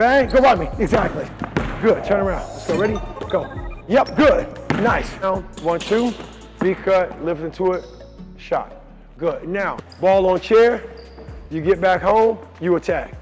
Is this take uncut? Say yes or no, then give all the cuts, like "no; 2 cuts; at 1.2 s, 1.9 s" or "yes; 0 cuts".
no; 2 cuts; at 5.2 s, 9.8 s